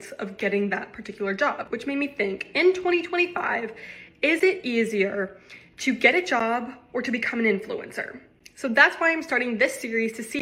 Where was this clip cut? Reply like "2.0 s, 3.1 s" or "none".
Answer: none

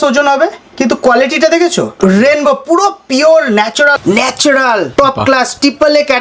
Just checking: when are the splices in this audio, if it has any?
1.9 s, 3.9 s, 4.9 s

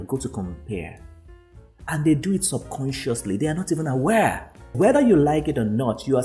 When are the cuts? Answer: 4.7 s

